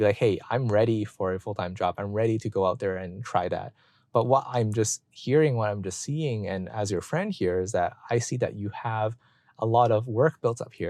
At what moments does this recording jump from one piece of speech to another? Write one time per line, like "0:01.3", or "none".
none